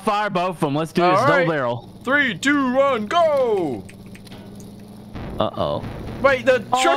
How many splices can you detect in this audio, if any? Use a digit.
0